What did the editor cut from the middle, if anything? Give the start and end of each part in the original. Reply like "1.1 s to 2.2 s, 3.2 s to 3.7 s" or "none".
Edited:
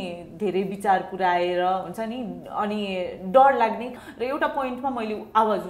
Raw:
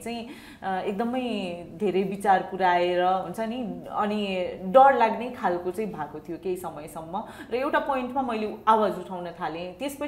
5.4 s to 7.3 s